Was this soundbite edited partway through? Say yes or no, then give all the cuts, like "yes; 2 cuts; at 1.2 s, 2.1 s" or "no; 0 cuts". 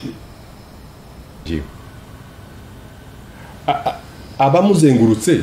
yes; 1 cut; at 1.5 s